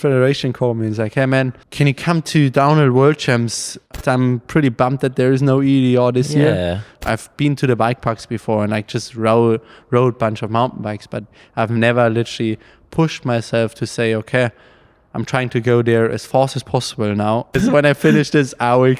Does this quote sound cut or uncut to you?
cut